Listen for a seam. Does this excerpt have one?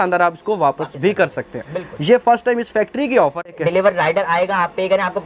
yes; 1 cut; at 3.5 s

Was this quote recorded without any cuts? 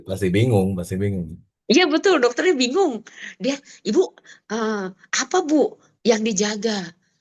yes; 0 cuts

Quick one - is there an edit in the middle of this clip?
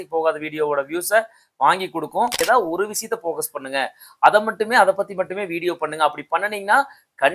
yes; 1 cut; at 2.4 s

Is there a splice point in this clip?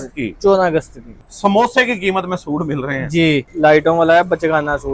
yes; 2 cuts; at 1.2 s, 3.5 s

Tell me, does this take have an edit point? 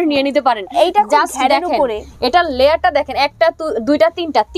no; 0 cuts

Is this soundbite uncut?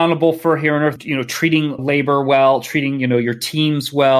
no; 1 cut; at 1.0 s

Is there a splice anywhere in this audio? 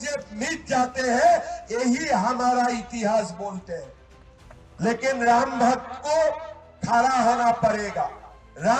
no; 0 cuts

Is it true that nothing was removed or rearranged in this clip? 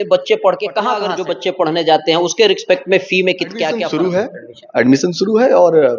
no; 2 cuts; at 1.1 s, 3.8 s

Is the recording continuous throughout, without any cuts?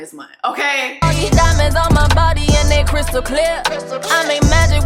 no; 1 cut; at 0.9 s

